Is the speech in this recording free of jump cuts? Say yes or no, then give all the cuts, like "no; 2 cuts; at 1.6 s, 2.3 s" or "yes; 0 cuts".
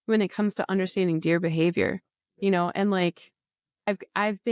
yes; 0 cuts